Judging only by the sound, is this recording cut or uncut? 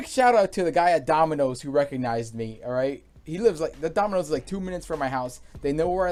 uncut